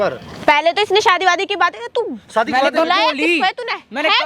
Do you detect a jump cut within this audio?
no; 0 cuts

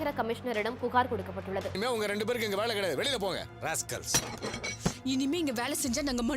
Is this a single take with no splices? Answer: no; 1 cut; at 1.8 s

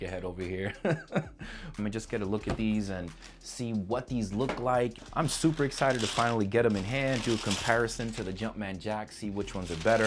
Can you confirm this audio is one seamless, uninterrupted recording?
no; 2 cuts; at 1.7 s, 5.0 s

